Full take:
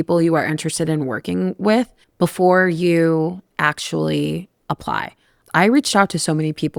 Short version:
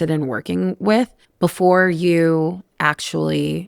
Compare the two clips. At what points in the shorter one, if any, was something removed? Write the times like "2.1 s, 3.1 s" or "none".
none